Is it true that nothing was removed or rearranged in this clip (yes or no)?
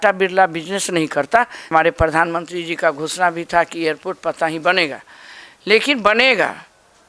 no